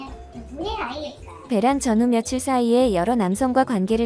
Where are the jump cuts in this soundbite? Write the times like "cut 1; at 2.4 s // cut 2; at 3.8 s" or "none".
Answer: cut 1; at 1.5 s

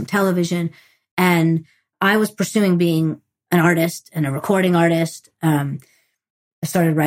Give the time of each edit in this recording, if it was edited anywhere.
cut 1; at 1.9 s

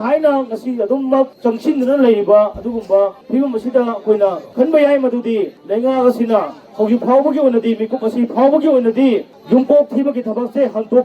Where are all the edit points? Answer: cut 1; at 1.3 s // cut 2; at 3.2 s // cut 3; at 4.4 s // cut 4; at 5.6 s // cut 5; at 9.3 s

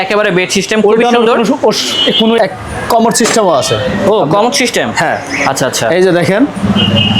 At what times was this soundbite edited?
cut 1; at 2.4 s

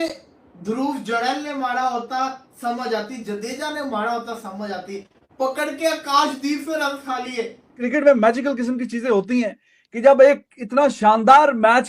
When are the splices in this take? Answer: cut 1; at 7.8 s

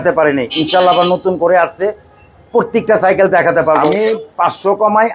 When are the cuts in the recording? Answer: cut 1; at 3.8 s

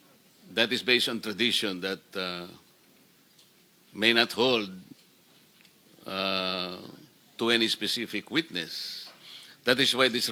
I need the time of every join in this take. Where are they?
none

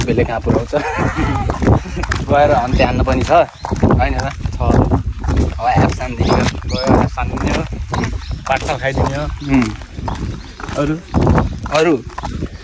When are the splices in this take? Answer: none

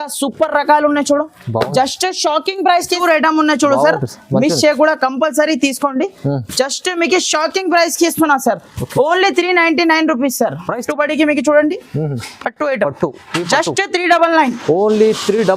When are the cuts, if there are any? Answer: cut 1; at 3.0 s // cut 2; at 10.7 s

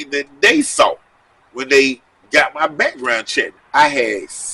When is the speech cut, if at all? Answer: cut 1; at 3.5 s

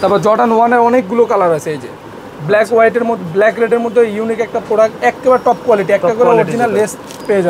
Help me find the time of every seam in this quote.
none

